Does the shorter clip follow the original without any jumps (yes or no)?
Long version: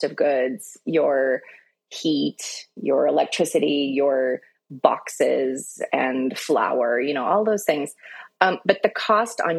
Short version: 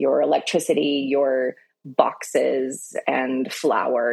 yes